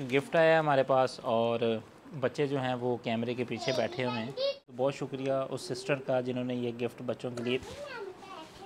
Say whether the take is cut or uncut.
cut